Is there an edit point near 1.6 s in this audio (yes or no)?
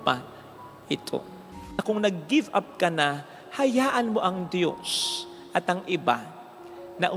yes